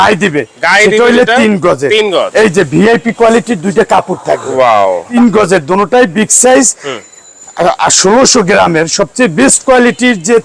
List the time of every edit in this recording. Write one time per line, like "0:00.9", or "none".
0:05.1